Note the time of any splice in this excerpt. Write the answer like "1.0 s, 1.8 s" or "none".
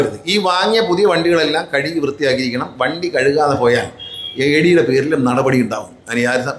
none